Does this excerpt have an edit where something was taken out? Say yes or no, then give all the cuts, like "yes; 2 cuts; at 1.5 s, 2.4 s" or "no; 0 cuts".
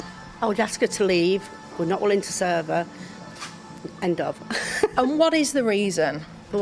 yes; 1 cut; at 1.5 s